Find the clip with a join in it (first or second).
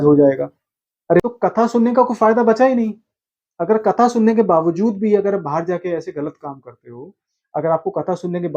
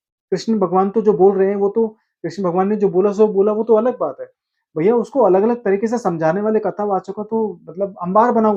first